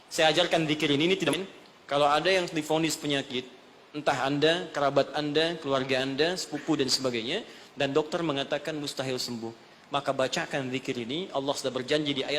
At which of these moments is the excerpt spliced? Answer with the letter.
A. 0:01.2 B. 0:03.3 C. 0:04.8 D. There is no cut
A